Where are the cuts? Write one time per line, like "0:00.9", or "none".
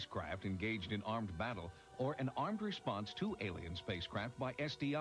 0:01.8